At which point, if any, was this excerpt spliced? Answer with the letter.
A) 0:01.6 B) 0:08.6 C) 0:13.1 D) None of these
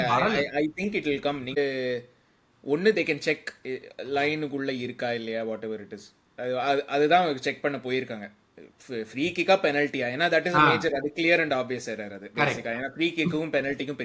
A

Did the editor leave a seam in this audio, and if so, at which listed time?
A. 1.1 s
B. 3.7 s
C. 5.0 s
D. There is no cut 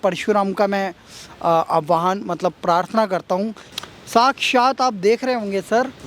B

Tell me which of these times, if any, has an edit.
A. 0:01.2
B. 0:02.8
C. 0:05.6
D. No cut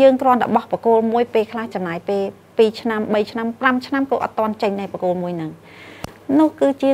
D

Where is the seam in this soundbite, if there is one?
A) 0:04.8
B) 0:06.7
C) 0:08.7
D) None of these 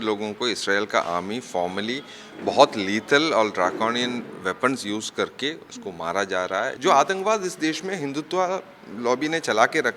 B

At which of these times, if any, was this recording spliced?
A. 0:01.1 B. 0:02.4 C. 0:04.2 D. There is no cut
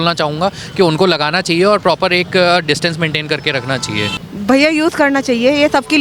C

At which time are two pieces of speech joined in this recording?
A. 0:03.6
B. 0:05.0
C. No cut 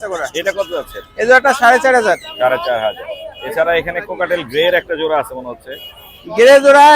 C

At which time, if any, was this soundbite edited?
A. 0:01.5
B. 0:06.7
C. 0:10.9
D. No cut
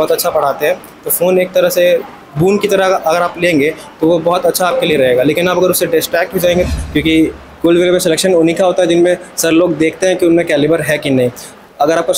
B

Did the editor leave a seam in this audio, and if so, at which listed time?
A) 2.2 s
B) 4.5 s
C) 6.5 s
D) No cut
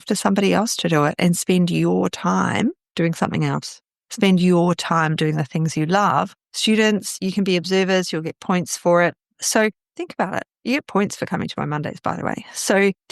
C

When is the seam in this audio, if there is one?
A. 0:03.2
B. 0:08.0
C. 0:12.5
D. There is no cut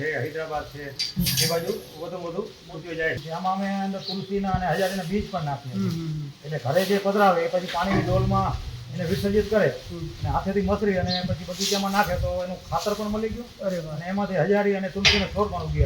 A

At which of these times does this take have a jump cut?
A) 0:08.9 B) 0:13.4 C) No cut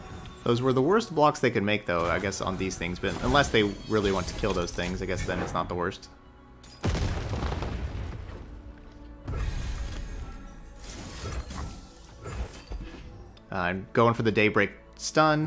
B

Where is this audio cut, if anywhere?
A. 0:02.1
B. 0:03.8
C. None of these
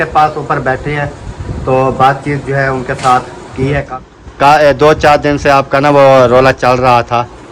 B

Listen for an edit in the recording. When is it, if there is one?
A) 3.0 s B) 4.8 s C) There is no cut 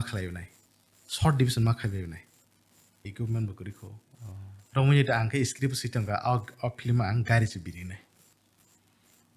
A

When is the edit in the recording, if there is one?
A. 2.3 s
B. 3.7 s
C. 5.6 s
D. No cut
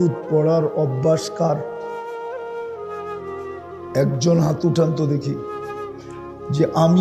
D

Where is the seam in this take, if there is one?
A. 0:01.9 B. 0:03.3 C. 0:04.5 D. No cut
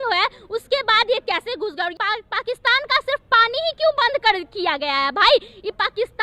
A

